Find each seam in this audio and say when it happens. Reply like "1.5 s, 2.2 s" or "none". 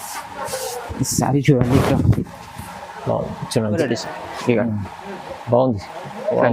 3.8 s

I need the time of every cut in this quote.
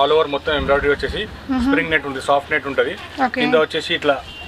none

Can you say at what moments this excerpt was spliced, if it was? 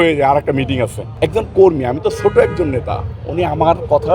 1.0 s

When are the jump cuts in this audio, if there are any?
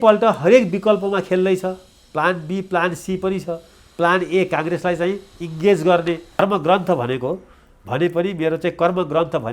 6.4 s

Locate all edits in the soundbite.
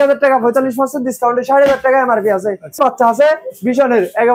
2.8 s

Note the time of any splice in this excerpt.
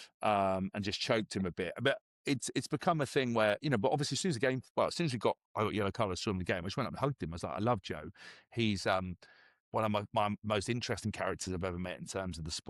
none

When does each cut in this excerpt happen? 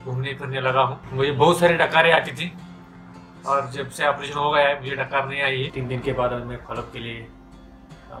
1.0 s, 5.7 s

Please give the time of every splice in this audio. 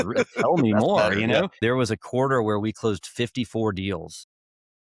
1.5 s

